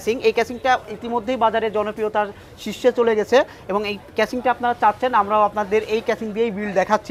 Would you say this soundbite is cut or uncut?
uncut